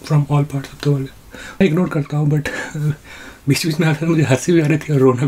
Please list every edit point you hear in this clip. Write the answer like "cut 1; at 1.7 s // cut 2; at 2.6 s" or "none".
cut 1; at 1.6 s